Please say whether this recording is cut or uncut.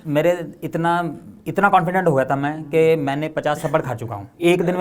uncut